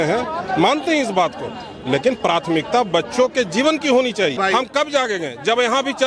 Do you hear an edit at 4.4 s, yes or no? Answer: yes